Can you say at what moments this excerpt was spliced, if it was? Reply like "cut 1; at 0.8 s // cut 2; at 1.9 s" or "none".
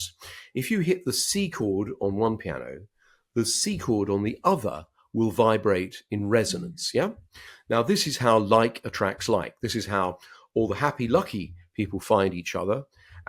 none